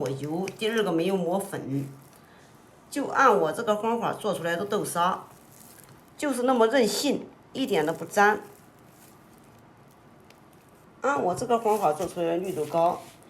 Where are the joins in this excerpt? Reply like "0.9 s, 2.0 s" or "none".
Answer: 7.4 s, 10.8 s

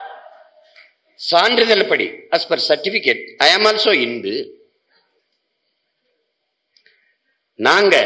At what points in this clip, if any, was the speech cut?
none

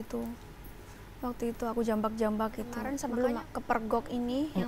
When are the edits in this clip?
2.8 s

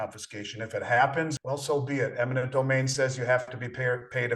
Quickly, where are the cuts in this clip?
1.4 s

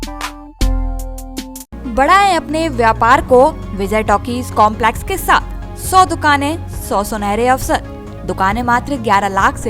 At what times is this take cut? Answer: none

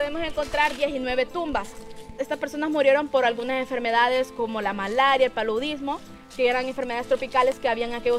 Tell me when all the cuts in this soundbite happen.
2.3 s

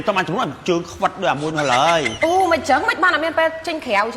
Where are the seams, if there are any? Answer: 2.1 s

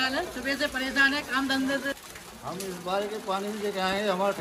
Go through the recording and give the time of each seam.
1.9 s

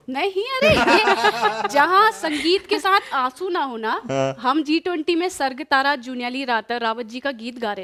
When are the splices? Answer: none

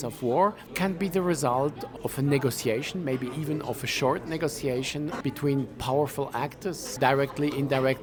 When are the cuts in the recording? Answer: none

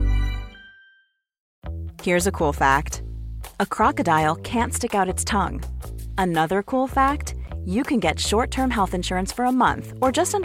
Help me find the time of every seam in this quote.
1.5 s

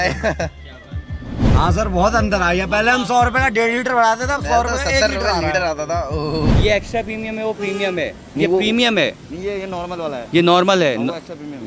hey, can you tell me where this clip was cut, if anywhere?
1.4 s, 6.5 s

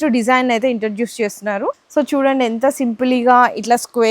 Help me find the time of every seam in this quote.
1.8 s

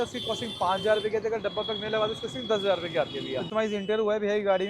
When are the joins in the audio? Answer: 3.5 s

